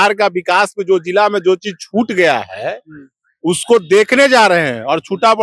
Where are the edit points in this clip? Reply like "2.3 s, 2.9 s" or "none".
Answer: none